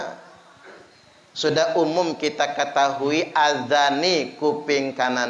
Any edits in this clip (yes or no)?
no